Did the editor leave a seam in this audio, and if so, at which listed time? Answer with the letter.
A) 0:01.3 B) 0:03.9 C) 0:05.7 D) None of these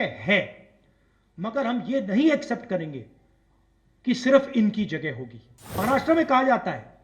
C